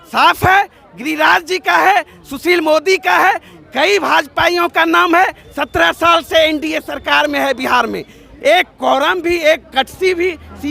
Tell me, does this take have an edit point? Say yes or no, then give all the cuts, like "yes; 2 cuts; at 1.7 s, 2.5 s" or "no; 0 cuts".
yes; 1 cut; at 5.5 s